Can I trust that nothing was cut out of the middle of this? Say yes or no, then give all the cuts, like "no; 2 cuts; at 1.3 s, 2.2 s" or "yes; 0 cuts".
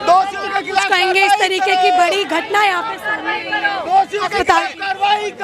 yes; 0 cuts